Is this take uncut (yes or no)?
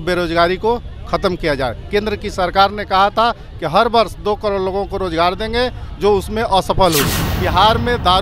no